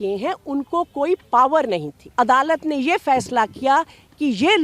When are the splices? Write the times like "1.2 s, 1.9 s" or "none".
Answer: 2.0 s

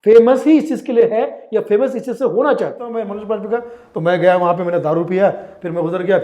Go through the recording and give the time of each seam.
3.1 s

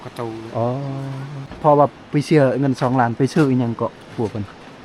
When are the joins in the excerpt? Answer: 1.5 s

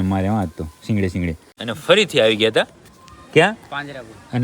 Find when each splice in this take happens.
1.7 s

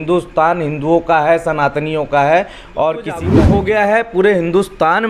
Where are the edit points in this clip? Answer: 3.3 s

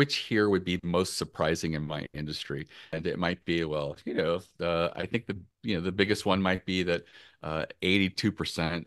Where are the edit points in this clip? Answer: 2.9 s

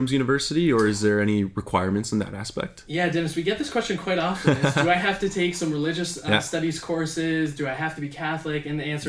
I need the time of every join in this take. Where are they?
none

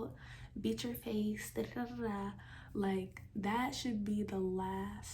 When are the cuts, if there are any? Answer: none

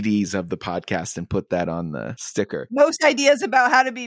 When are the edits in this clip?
2.7 s

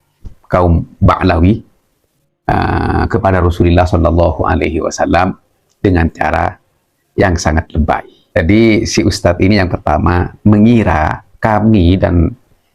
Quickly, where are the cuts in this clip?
8.1 s

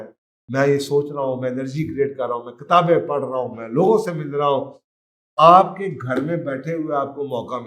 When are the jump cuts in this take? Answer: none

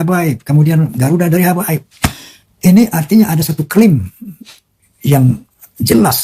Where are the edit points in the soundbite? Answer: none

